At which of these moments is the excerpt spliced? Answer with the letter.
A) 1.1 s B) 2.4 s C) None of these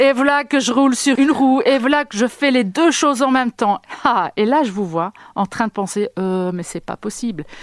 A